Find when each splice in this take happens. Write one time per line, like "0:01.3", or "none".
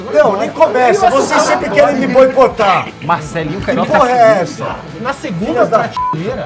none